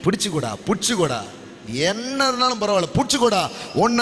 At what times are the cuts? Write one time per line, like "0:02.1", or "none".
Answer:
none